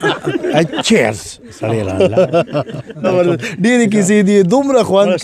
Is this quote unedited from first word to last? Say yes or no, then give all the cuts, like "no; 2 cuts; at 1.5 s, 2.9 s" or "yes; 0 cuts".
no; 1 cut; at 3.1 s